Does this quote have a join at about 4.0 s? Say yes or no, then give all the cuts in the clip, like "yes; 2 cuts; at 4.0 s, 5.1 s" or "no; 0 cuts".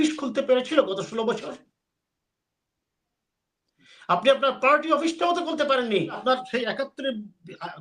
no; 1 cut; at 6.2 s